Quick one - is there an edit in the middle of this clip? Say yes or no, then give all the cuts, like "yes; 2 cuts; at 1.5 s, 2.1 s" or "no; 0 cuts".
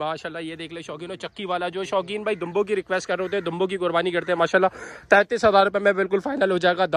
no; 0 cuts